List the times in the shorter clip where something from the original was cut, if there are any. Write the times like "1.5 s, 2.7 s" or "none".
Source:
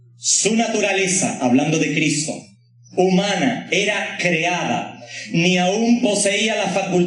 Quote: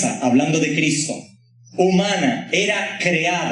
none